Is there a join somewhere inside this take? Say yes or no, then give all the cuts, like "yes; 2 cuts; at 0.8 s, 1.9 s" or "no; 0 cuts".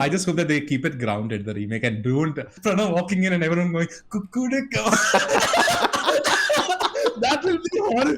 yes; 1 cut; at 2.5 s